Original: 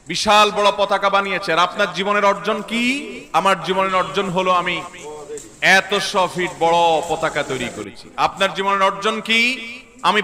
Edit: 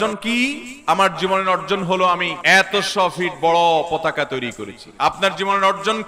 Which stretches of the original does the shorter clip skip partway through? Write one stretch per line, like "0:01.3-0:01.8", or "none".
0:04.8-0:05.5